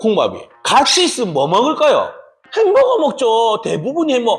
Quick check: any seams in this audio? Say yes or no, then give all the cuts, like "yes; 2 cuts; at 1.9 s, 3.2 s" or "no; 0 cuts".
no; 0 cuts